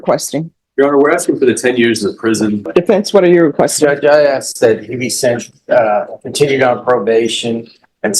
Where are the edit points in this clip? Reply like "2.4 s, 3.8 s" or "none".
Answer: 2.7 s